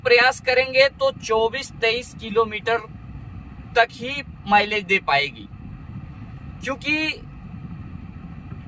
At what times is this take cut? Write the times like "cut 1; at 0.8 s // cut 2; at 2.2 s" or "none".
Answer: none